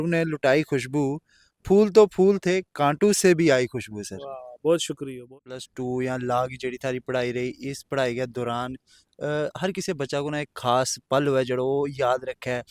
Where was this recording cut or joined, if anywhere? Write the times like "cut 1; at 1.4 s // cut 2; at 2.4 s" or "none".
cut 1; at 5.3 s